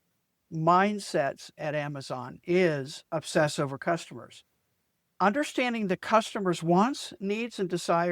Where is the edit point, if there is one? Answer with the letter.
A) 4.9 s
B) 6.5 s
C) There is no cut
A